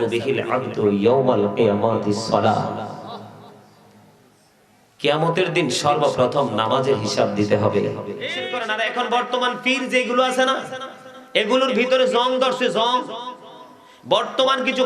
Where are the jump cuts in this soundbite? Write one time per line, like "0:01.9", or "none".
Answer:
0:08.6